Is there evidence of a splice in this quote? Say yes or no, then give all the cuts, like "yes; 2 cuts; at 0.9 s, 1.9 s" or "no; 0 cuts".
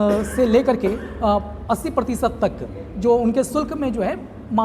no; 0 cuts